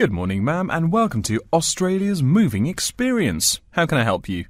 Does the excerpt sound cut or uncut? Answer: uncut